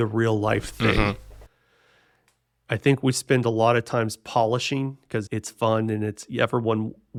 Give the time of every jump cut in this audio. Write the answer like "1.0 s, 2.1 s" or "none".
none